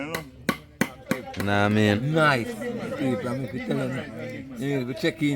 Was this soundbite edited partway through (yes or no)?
yes